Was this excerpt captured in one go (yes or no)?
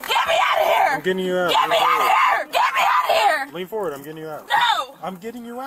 yes